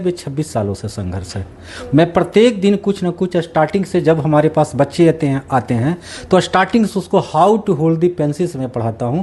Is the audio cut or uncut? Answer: uncut